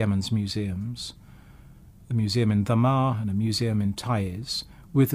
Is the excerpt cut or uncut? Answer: uncut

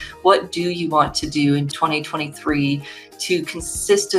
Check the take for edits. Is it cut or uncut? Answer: cut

